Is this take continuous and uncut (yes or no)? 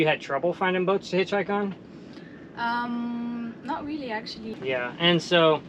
no